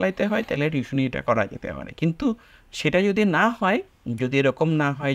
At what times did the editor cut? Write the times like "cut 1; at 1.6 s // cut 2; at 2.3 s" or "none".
none